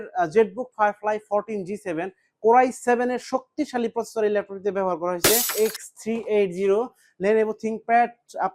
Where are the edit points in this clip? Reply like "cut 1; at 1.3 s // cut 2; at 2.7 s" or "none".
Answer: cut 1; at 5.5 s